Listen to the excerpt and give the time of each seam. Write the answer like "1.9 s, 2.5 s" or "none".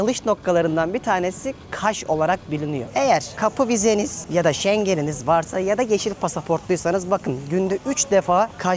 2.8 s